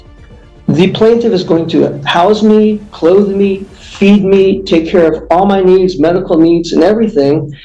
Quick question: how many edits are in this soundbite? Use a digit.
0